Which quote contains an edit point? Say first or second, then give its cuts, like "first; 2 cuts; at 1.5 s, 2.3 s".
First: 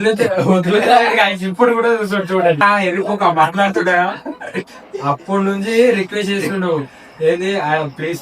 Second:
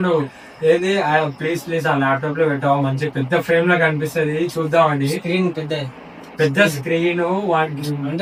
first; 1 cut; at 2.6 s